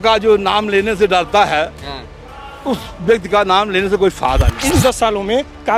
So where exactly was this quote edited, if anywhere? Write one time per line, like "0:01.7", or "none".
0:04.5